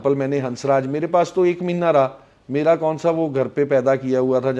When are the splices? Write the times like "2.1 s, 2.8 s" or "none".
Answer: none